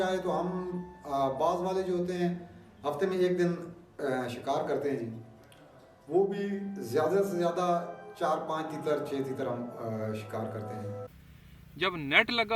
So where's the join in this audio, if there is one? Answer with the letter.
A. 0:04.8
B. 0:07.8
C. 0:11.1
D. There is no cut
C